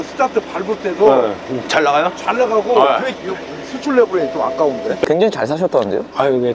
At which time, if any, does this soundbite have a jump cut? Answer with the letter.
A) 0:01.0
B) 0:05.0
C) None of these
B